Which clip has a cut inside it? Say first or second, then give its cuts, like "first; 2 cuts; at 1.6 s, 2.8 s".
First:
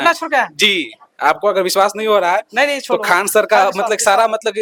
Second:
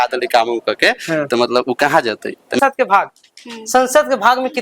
second; 1 cut; at 2.6 s